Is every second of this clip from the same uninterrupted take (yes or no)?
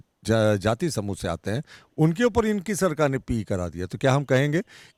yes